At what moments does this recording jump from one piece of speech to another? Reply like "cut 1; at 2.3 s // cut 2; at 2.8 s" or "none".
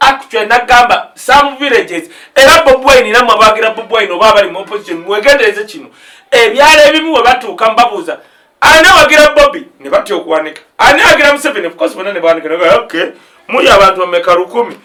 none